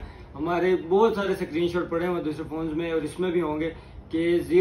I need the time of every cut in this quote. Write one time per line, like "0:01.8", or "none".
none